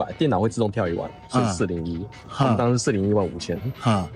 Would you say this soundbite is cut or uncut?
uncut